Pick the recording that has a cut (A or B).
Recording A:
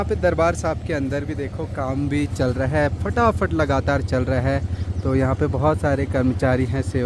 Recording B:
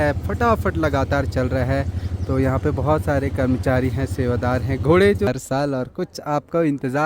B